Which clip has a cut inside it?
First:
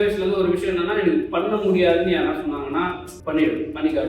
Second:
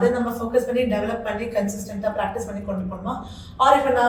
first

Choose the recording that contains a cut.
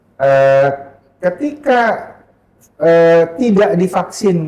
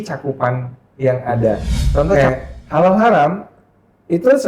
second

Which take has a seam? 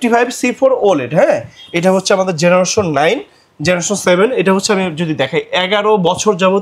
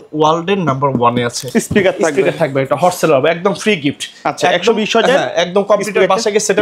second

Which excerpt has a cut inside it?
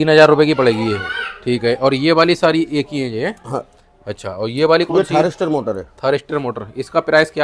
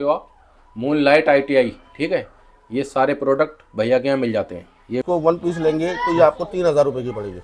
second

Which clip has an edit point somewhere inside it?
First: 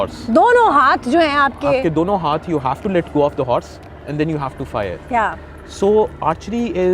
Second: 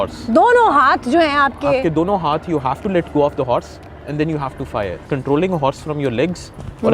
second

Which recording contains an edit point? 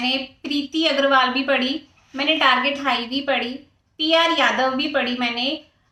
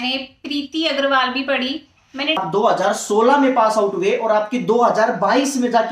second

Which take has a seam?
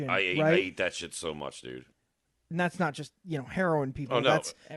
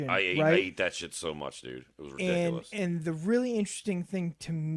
first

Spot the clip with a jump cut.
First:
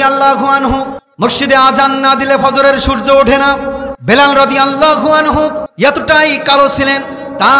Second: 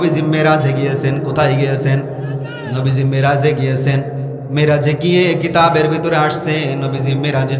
first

